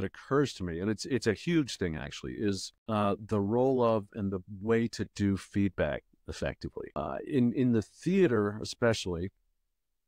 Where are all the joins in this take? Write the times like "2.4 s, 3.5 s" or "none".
2.7 s, 6.8 s